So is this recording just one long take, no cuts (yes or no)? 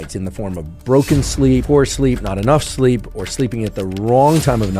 no